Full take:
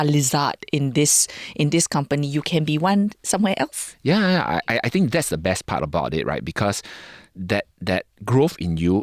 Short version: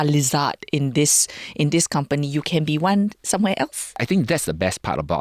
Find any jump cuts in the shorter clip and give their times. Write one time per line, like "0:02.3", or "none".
0:04.0